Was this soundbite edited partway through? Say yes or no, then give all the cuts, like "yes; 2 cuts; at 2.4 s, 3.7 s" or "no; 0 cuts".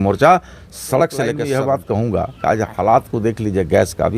yes; 1 cut; at 1.4 s